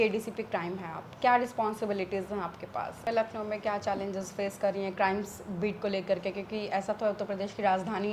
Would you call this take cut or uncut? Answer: cut